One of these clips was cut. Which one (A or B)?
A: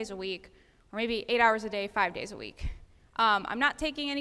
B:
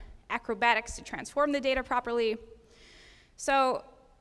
B